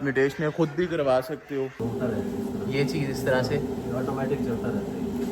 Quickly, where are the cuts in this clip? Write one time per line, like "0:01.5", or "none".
0:01.8